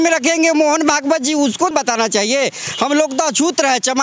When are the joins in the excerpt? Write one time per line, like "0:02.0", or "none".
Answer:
0:01.7